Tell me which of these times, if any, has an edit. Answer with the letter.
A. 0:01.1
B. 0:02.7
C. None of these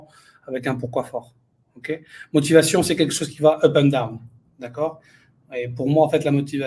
C